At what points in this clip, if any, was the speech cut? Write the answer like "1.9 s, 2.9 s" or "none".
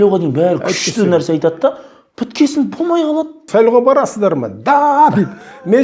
3.4 s